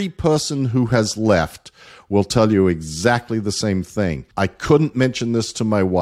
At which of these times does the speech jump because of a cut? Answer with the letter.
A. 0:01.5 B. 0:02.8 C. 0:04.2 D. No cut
C